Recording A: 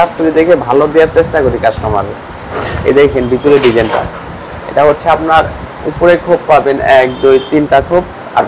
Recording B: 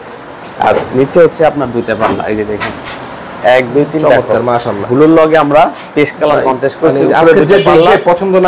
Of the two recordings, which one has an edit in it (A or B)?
B